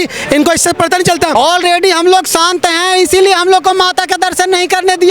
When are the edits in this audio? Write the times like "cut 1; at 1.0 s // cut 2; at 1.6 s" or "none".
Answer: cut 1; at 1.3 s